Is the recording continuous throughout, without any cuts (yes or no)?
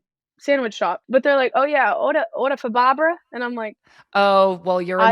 no